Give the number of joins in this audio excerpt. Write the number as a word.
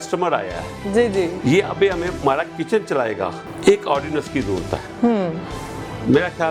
one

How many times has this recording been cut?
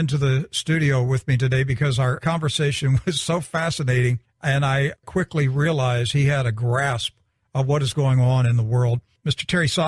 one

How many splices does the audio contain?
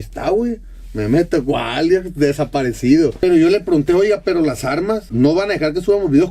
one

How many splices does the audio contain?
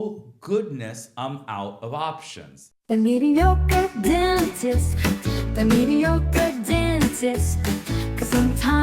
one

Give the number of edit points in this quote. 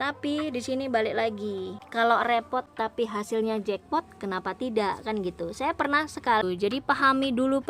three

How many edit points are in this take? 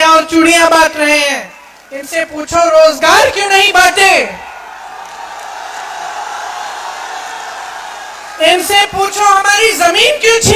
zero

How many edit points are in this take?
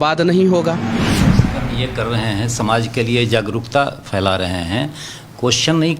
one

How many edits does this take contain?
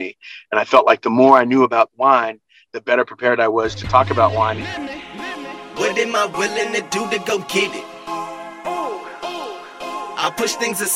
one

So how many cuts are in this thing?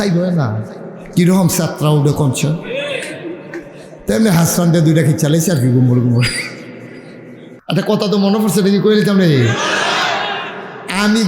one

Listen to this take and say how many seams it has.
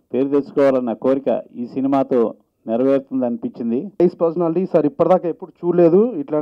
one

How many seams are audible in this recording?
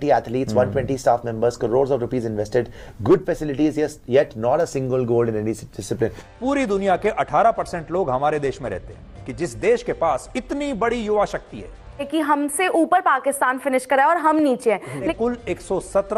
four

